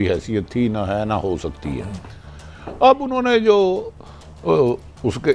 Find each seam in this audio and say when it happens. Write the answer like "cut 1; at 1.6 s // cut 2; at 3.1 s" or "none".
none